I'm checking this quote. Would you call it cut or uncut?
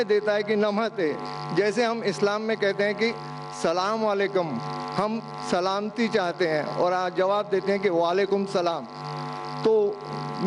uncut